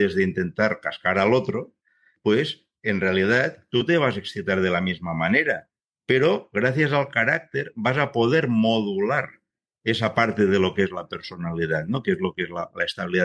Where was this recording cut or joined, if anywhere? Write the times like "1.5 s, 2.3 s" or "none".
none